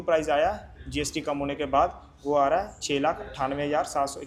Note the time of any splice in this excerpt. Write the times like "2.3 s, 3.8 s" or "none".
none